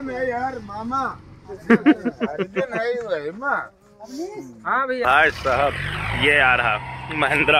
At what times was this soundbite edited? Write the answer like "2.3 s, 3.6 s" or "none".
5.0 s